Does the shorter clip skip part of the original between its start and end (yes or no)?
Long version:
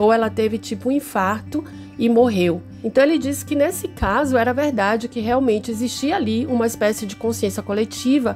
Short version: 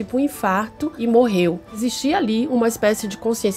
yes